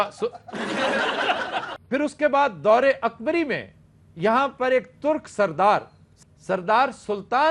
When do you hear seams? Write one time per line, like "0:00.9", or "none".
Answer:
0:01.8